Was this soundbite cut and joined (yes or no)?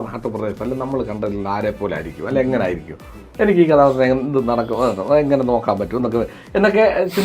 no